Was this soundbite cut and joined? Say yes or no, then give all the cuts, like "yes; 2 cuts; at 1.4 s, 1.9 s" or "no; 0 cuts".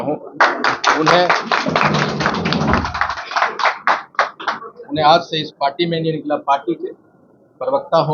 no; 0 cuts